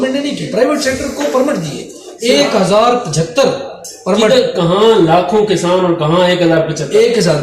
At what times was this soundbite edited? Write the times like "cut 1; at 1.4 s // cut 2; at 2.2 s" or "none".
none